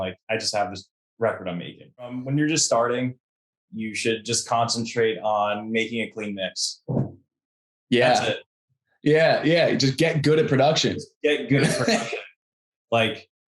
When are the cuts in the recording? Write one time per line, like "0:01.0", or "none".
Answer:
0:02.2